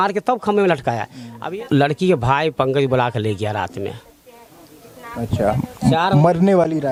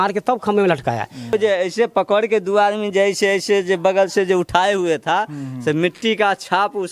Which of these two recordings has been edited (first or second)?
second